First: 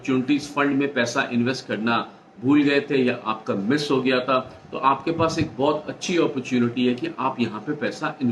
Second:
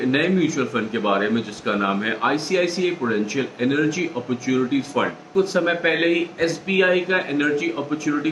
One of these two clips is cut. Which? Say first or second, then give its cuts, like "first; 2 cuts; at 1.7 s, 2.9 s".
second; 1 cut; at 5.3 s